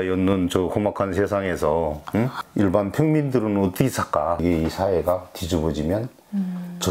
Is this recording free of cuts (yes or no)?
no